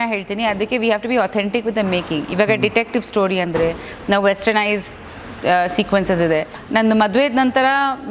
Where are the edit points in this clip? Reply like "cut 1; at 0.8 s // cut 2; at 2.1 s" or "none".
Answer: cut 1; at 6.6 s